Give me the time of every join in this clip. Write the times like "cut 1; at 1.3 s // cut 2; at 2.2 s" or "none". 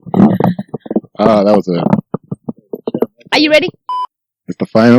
cut 1; at 3.8 s